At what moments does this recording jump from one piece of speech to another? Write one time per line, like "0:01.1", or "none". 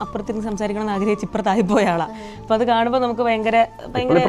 none